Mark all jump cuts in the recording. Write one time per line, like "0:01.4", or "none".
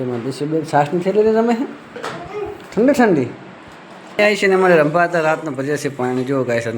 0:04.2